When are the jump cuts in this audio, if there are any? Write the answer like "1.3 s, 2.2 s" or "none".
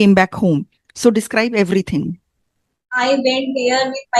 2.9 s